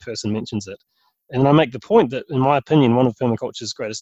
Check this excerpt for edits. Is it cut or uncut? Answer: uncut